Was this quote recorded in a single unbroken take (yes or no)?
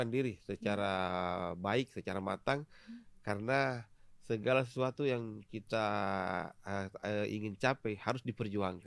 yes